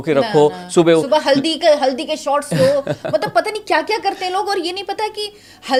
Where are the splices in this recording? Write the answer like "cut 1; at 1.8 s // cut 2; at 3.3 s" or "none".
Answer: none